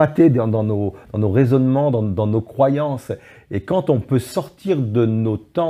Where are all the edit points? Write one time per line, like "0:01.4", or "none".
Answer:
none